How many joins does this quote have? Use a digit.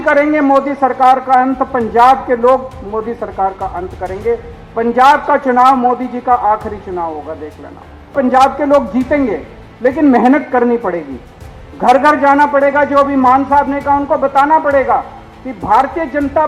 0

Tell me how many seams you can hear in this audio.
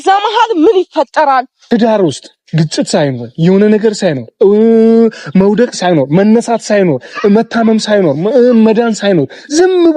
1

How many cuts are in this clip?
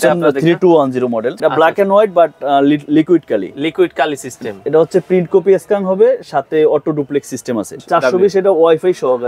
2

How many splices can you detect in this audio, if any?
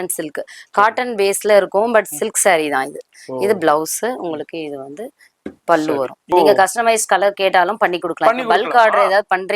1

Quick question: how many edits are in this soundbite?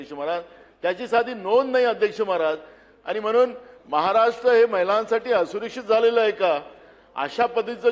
0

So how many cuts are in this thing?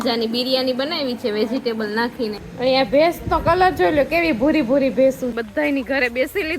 2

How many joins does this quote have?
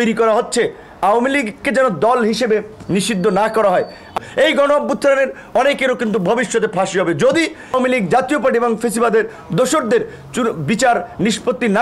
2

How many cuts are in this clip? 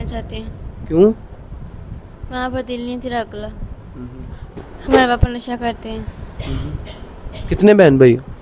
1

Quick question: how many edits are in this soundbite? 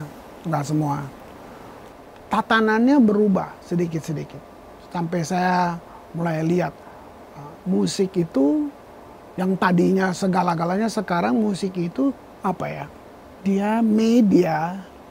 2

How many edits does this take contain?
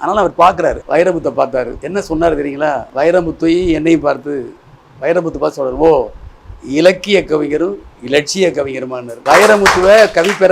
4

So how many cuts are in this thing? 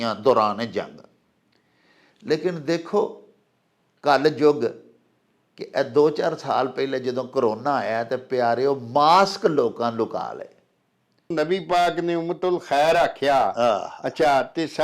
1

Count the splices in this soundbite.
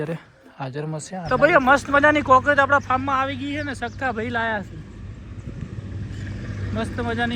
1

